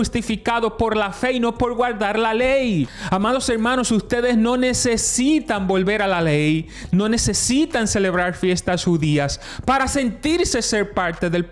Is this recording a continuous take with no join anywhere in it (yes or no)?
no